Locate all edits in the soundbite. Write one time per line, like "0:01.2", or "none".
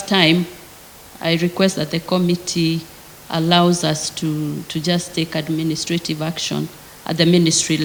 none